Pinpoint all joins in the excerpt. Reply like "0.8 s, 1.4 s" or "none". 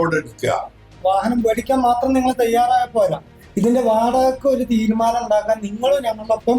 1.0 s

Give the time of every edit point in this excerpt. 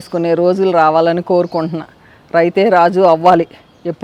none

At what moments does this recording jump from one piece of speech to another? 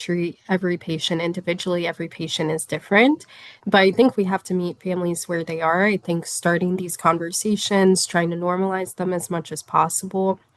none

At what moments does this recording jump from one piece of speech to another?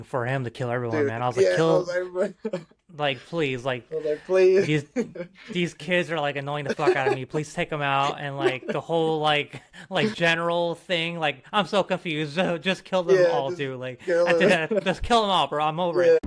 none

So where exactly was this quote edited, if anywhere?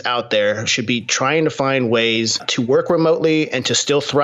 none

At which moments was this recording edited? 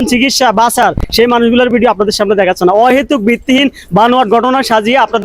none

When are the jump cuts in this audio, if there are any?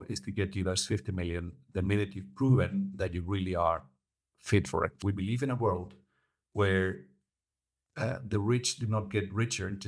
5.0 s

